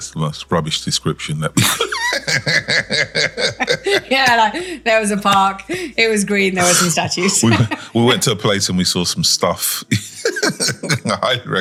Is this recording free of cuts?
yes; 0 cuts

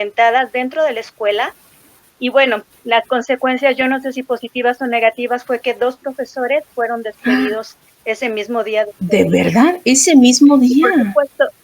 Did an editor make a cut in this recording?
no; 0 cuts

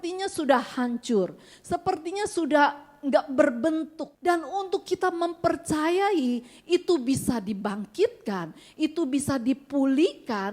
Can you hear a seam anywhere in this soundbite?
yes; 1 cut; at 4.0 s

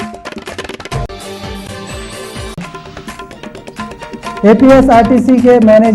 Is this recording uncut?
no; 1 cut; at 0.9 s

